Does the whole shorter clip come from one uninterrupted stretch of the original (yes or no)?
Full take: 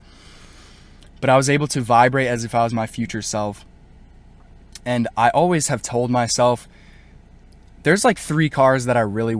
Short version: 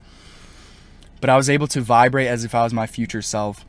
yes